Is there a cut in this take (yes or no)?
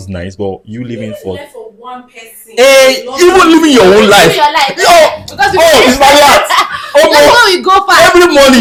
no